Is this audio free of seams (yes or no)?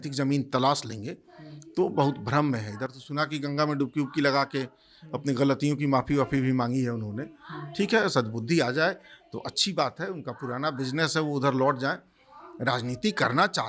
yes